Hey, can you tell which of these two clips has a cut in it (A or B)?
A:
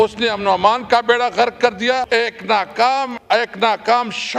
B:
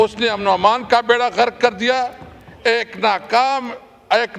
A